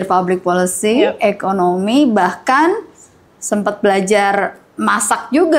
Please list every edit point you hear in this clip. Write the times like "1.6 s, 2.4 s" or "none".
none